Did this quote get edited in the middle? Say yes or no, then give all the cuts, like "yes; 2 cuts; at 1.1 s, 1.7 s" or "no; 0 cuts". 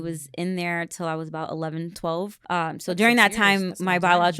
yes; 1 cut; at 2.4 s